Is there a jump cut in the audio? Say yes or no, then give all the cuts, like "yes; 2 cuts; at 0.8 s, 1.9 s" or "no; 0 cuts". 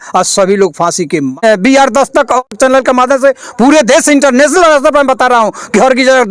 yes; 2 cuts; at 1.3 s, 2.5 s